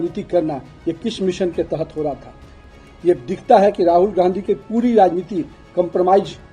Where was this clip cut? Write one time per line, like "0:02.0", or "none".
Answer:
0:02.6